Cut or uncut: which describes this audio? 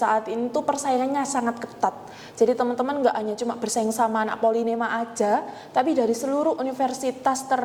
uncut